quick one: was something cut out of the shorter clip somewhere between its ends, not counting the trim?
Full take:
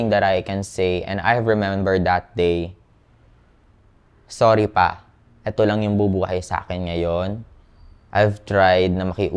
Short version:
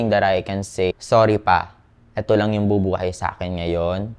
yes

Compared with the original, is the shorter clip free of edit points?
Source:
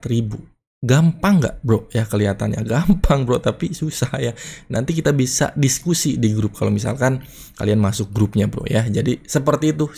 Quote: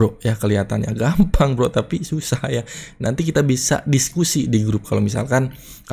yes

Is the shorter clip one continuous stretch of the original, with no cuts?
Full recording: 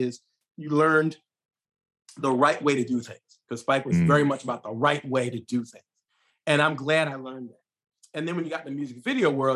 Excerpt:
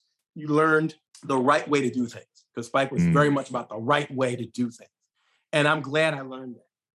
no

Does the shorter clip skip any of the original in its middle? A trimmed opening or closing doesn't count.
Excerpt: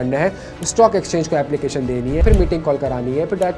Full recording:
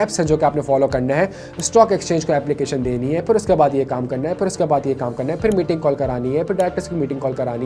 yes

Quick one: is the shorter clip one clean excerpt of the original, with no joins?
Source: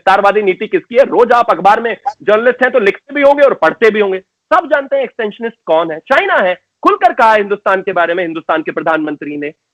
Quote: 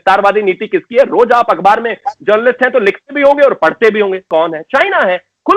no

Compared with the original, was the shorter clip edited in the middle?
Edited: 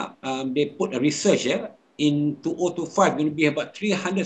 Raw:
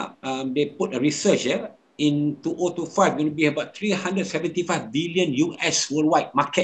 no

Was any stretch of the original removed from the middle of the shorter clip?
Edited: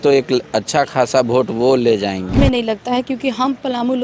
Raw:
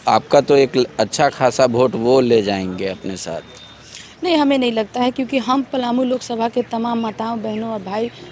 yes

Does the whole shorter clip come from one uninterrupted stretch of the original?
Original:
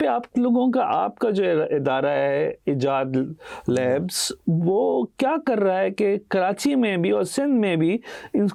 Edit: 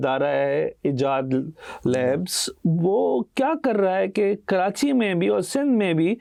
yes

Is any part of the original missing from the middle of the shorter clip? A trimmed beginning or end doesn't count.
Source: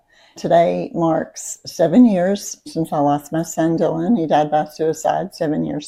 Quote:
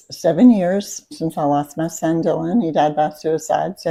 no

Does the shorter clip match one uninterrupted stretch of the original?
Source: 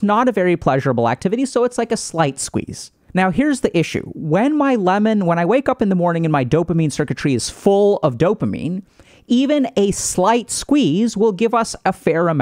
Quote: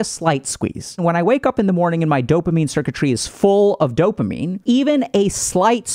no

